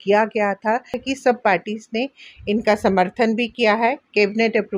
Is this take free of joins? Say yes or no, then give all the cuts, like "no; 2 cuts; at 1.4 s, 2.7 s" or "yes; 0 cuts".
no; 1 cut; at 1.0 s